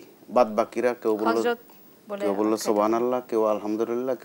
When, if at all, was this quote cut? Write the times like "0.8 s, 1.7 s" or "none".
none